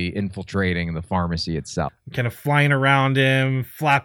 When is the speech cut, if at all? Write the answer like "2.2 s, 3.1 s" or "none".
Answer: 2.0 s